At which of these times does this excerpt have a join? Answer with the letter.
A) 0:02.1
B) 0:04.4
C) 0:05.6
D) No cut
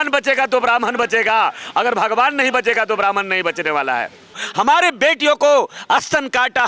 B